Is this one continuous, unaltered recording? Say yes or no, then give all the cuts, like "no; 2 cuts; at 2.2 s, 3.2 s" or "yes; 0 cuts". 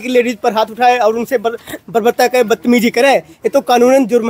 yes; 0 cuts